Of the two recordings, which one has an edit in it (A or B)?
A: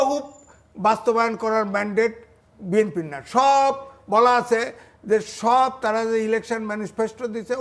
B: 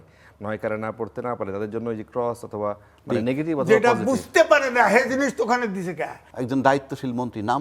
B